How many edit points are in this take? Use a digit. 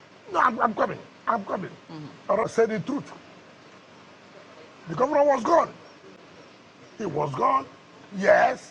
1